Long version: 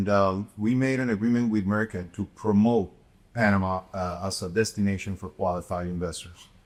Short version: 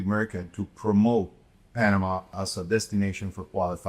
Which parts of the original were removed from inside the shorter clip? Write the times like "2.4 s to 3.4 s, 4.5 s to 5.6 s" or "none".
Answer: 3.9 s to 4.1 s